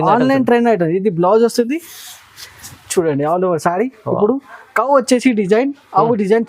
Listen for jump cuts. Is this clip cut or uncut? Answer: uncut